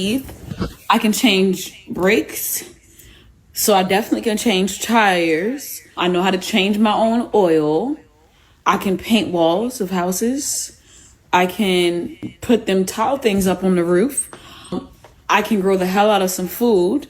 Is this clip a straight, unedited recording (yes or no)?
no